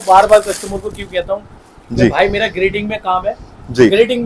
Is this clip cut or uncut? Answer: uncut